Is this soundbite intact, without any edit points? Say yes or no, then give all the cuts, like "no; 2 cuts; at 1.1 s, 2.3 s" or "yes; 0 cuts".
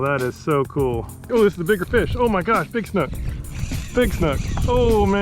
no; 1 cut; at 1.2 s